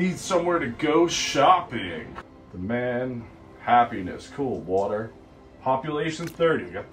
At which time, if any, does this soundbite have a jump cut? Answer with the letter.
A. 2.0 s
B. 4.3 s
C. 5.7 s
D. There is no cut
A